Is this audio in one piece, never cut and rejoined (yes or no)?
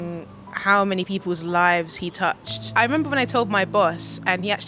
no